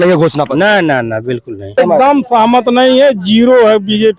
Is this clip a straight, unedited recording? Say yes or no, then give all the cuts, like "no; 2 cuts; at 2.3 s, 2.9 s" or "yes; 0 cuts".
no; 1 cut; at 1.8 s